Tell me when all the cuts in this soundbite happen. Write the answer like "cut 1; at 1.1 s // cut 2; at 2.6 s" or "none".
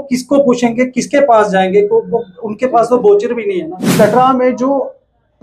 cut 1; at 3.9 s